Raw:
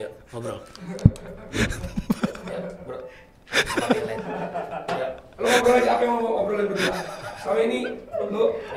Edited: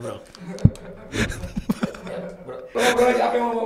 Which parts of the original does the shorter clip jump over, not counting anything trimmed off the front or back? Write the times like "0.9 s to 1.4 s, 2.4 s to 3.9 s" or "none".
3.0 s to 5.3 s